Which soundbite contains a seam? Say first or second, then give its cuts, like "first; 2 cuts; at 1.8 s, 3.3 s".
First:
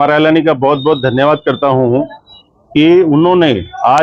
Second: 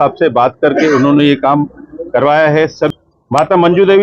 second; 1 cut; at 2.9 s